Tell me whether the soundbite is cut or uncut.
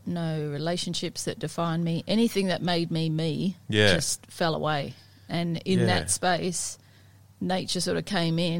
uncut